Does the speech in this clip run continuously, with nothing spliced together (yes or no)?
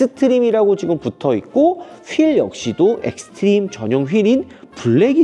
yes